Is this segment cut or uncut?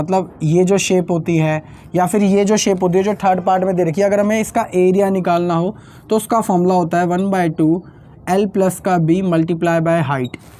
uncut